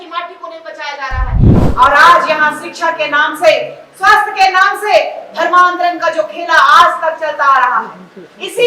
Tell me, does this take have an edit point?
yes; 1 cut; at 1.6 s

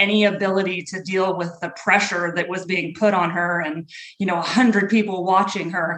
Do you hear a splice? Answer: no; 0 cuts

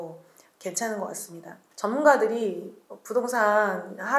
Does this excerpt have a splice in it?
no; 0 cuts

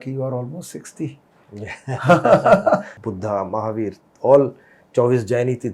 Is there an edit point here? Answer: yes; 1 cut; at 3.0 s

